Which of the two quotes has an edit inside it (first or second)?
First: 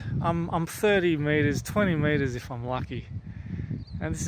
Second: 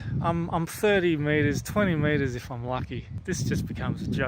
second